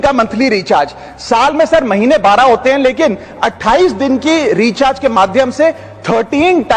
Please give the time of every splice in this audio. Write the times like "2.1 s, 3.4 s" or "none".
none